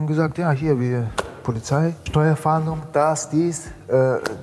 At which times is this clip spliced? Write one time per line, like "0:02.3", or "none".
0:02.0